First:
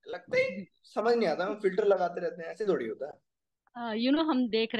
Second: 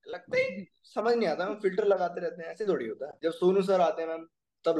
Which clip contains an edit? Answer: second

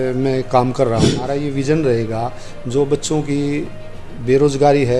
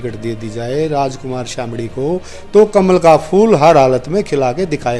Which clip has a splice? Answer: first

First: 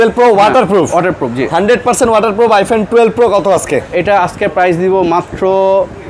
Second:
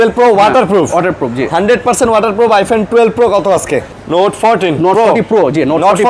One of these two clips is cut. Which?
second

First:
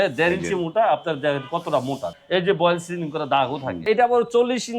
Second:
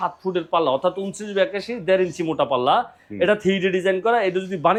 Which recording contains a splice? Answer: first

